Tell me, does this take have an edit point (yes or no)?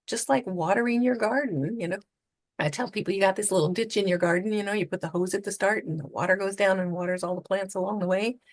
no